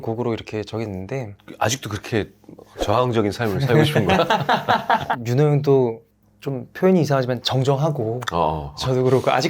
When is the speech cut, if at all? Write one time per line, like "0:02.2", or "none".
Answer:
0:01.4
0:05.1